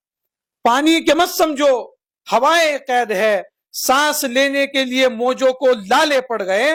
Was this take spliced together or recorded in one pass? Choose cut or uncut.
uncut